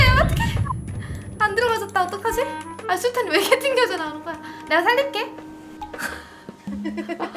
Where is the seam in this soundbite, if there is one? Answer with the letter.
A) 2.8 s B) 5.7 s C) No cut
A